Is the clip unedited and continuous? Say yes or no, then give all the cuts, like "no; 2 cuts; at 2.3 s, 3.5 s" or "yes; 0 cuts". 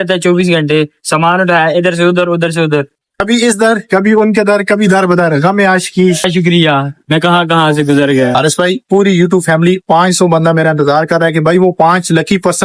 no; 2 cuts; at 3.2 s, 8.3 s